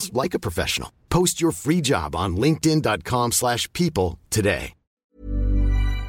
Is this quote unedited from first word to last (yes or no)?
no